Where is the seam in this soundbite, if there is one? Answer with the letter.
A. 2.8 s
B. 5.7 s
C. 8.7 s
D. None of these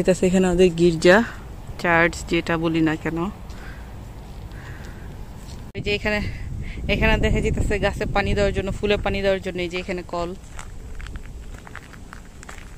B